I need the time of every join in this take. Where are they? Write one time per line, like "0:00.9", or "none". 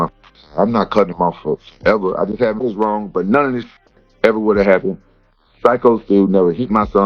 0:02.6